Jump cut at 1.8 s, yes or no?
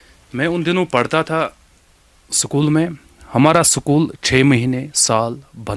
no